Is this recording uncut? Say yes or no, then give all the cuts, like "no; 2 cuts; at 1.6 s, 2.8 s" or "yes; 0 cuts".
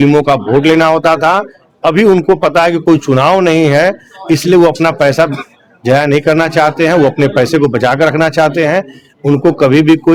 yes; 0 cuts